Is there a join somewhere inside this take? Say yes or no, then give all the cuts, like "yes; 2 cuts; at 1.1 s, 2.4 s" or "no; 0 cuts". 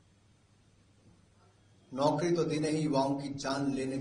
no; 0 cuts